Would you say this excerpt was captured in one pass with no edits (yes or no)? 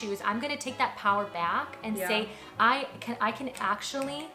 yes